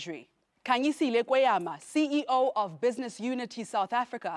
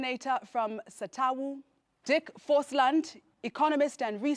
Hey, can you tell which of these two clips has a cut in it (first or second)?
first